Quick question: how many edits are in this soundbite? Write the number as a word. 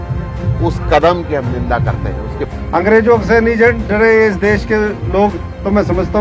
one